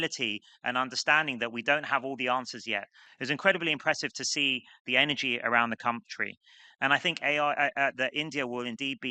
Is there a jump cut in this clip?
yes; 1 cut; at 3.0 s

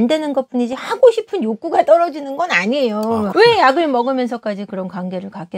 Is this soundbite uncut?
yes; 0 cuts

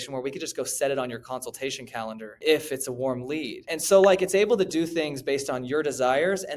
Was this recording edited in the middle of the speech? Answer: yes; 2 cuts; at 2.4 s, 3.7 s

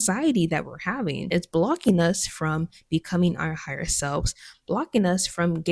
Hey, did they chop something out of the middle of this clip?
yes; 1 cut; at 1.2 s

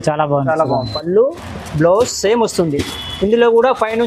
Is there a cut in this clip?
yes; 1 cut; at 1.0 s

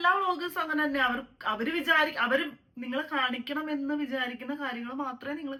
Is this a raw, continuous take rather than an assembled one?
yes; 0 cuts

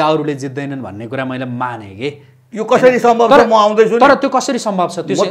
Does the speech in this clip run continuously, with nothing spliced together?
yes; 0 cuts

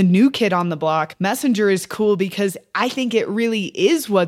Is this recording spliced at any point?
yes; 1 cut; at 1.1 s

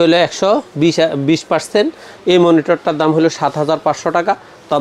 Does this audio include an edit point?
no; 0 cuts

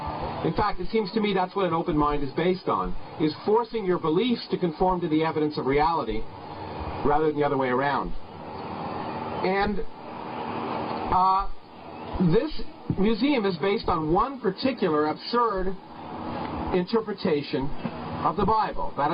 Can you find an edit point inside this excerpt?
yes; 1 cut; at 1.3 s

